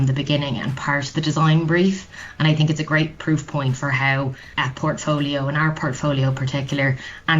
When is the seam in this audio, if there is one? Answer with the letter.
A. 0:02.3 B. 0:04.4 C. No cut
B